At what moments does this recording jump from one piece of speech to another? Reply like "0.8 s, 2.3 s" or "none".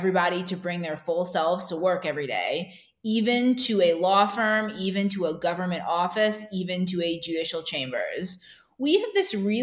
none

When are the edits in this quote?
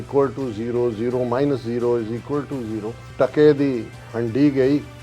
3.0 s

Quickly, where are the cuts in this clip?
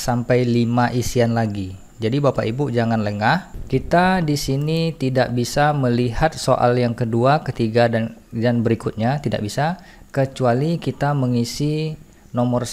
3.5 s

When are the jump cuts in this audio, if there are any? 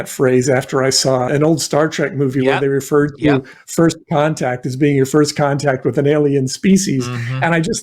1.3 s

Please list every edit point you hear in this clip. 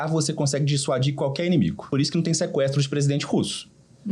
1.9 s

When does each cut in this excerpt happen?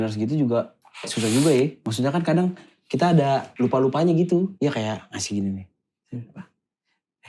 1.8 s, 3.5 s, 4.5 s

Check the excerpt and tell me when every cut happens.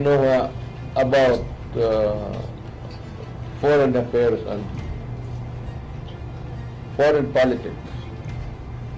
none

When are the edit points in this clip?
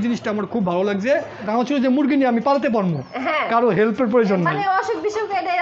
none

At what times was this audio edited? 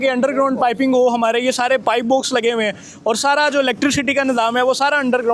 none

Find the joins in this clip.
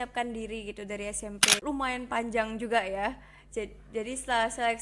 1.6 s

